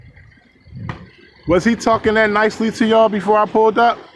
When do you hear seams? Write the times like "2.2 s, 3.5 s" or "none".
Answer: none